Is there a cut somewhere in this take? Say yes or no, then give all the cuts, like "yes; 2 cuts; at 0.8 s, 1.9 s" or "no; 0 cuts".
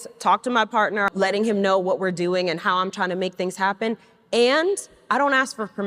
yes; 1 cut; at 1.1 s